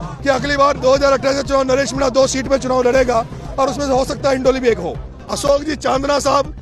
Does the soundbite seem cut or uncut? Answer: cut